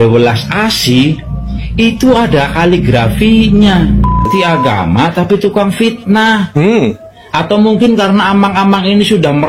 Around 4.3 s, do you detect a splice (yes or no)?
yes